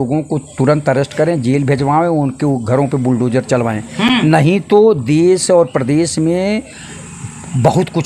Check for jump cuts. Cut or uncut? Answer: uncut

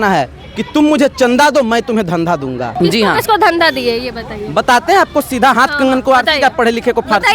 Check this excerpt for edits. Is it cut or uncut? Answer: cut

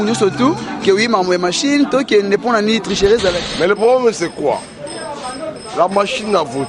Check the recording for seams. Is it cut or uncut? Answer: cut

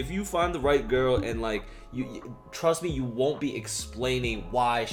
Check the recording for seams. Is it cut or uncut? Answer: uncut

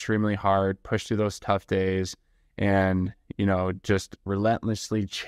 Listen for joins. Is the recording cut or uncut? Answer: cut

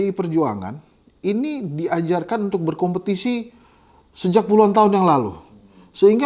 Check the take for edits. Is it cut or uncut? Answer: uncut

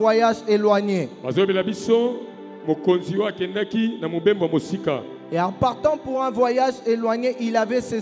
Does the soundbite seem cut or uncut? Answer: uncut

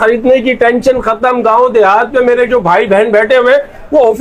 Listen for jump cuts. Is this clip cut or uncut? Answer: uncut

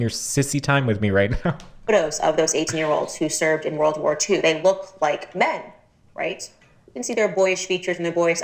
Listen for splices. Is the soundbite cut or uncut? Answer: uncut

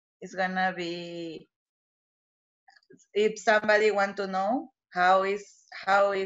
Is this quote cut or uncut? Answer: uncut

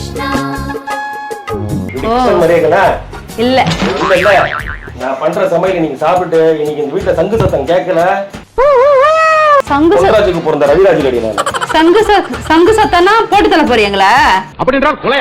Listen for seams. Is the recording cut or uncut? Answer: cut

